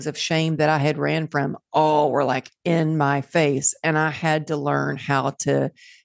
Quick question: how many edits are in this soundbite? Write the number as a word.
zero